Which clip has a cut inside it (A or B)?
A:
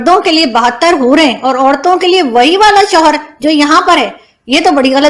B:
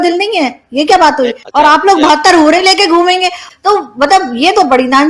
B